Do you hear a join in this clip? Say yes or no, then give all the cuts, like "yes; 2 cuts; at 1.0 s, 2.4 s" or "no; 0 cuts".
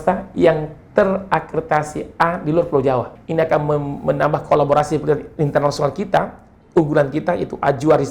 yes; 1 cut; at 3.2 s